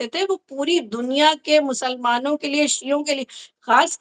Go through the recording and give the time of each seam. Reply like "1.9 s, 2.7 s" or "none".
none

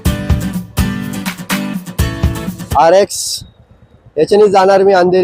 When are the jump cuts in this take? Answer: 2.6 s

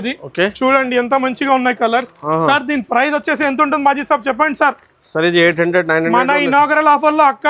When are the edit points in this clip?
none

